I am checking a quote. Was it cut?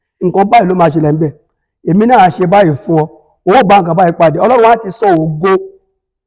no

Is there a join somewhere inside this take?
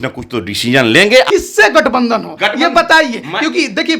yes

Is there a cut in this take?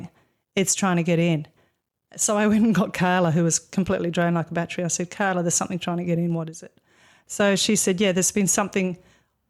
no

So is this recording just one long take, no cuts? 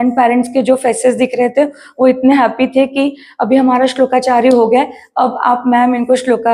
yes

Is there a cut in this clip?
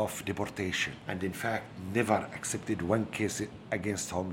yes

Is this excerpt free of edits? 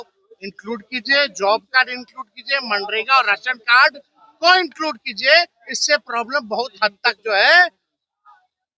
yes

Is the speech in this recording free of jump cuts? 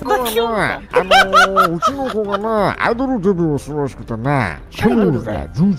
yes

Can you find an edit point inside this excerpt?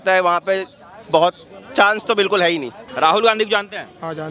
yes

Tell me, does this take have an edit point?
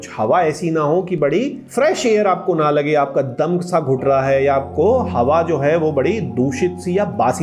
yes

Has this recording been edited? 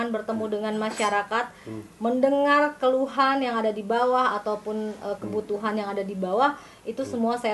no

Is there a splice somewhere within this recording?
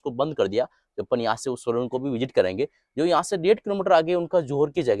no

